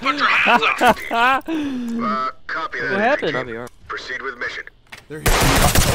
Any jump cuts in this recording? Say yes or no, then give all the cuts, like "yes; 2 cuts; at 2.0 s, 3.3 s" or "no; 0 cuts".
no; 0 cuts